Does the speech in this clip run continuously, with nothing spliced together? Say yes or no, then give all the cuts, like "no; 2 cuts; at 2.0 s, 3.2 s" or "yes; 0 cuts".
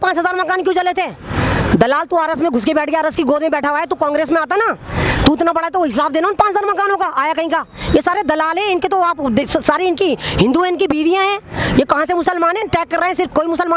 yes; 0 cuts